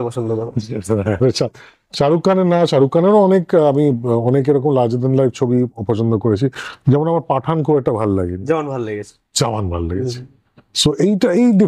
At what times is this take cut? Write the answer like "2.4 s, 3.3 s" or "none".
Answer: none